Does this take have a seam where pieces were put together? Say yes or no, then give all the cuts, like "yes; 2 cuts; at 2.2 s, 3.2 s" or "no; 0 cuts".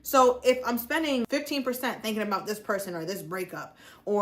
yes; 1 cut; at 1.3 s